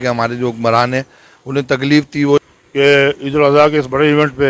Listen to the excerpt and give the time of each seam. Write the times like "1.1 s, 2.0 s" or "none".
2.4 s